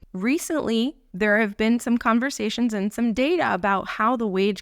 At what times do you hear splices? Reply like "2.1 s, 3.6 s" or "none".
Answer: 1.0 s